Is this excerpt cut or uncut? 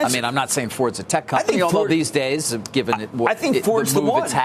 uncut